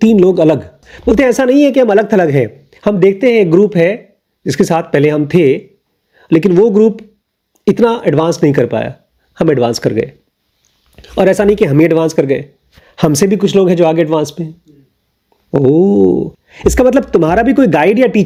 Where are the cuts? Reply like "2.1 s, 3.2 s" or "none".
none